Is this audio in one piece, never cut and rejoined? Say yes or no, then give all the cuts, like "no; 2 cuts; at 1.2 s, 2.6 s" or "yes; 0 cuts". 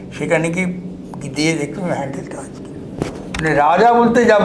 no; 1 cut; at 3.3 s